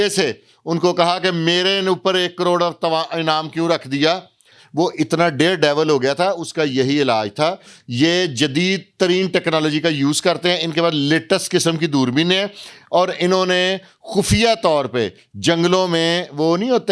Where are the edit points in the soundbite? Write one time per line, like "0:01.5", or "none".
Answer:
0:07.7

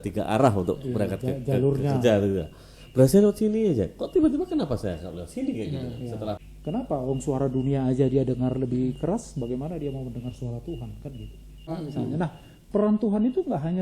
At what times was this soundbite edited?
0:06.4
0:11.7

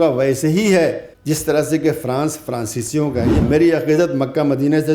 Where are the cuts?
0:01.1
0:03.4

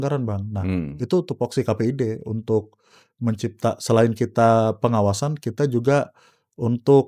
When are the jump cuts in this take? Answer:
none

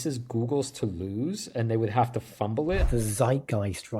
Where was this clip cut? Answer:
0:02.8

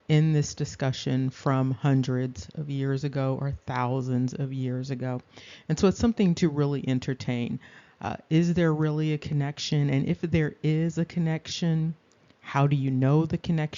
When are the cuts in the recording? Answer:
none

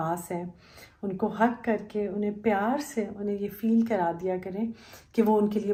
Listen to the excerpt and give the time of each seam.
none

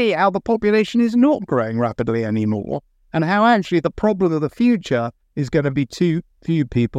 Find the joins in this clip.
none

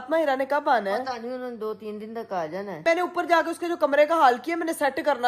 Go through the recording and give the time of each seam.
0:02.8

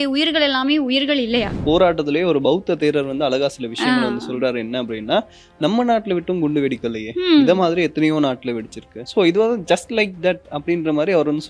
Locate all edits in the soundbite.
0:01.6
0:09.0

